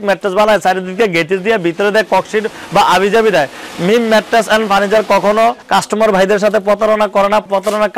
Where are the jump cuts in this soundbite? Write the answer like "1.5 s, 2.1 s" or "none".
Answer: none